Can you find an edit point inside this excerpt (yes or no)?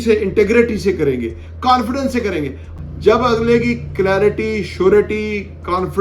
yes